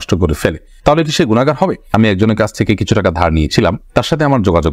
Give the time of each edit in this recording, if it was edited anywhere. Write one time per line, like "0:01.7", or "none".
0:01.9